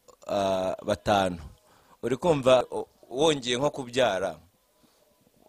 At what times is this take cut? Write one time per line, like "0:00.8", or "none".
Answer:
0:02.7